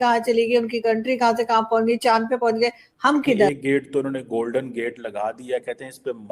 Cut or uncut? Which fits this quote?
cut